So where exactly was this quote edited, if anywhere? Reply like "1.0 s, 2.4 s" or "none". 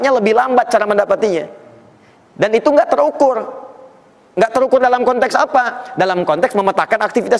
none